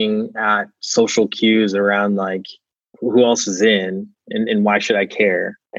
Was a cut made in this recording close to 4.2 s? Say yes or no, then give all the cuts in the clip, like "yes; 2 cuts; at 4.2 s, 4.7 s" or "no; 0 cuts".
no; 0 cuts